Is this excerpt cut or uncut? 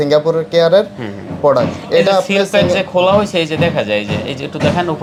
uncut